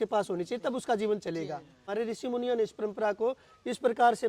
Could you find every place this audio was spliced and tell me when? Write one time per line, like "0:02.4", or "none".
0:01.9